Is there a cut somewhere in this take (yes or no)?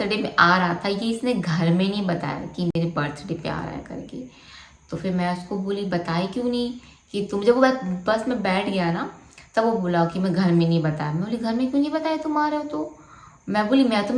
no